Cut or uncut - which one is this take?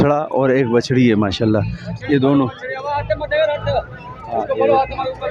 uncut